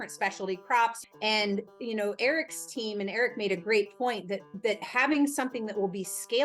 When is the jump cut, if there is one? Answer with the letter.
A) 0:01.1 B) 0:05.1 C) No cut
A